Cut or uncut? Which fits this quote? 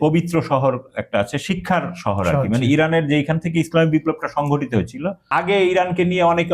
cut